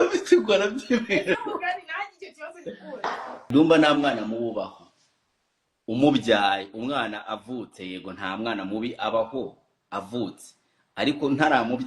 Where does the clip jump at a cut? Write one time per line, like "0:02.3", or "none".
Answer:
0:03.5